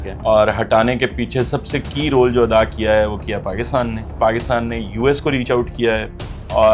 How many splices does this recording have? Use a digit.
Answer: 1